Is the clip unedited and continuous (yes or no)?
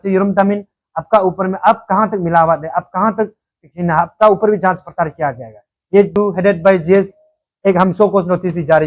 no